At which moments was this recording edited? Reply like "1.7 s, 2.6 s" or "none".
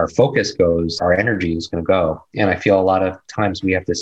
1.0 s